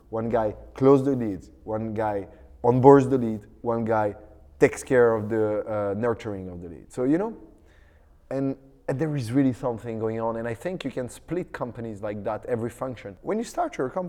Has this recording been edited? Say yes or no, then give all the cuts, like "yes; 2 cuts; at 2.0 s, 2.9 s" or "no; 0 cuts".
yes; 1 cut; at 13.1 s